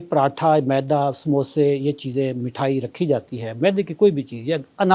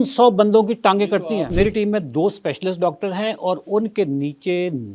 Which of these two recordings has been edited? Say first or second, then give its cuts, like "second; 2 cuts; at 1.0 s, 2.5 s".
second; 1 cut; at 1.2 s